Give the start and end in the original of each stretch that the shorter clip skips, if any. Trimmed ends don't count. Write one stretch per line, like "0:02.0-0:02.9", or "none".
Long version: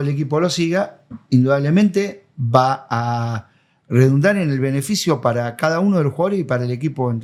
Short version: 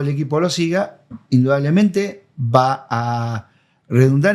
none